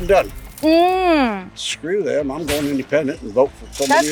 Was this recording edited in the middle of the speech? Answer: no; 0 cuts

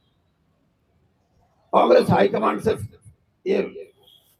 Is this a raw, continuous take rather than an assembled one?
yes; 0 cuts

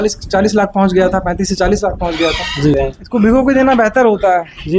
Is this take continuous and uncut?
no; 1 cut; at 2.8 s

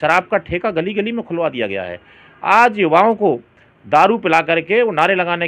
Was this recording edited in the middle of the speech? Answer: no; 0 cuts

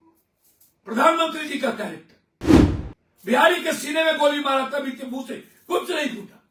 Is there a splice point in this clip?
no; 0 cuts

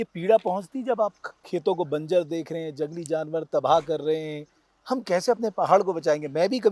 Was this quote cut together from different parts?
no; 0 cuts

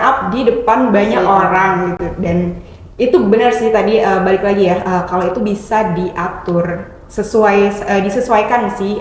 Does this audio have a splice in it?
no; 0 cuts

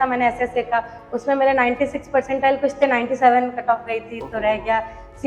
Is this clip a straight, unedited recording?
yes; 0 cuts

